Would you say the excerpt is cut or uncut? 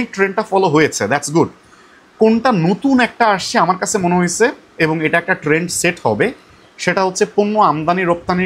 uncut